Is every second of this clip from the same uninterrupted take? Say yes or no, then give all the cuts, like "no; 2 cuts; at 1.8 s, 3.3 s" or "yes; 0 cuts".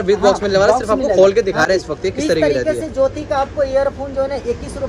yes; 0 cuts